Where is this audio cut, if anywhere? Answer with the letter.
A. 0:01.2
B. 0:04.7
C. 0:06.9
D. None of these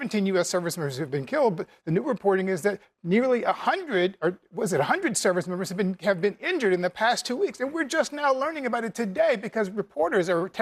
D